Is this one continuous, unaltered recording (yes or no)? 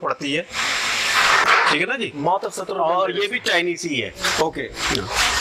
yes